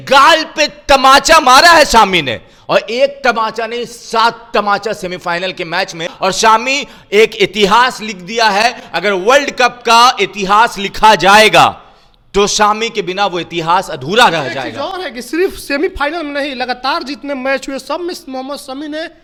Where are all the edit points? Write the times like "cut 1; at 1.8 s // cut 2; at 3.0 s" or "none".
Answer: none

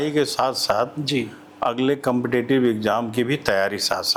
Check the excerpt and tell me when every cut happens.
none

